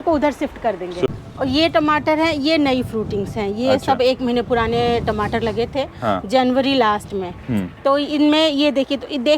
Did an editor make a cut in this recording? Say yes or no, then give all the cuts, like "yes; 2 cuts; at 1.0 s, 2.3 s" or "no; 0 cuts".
yes; 1 cut; at 1.1 s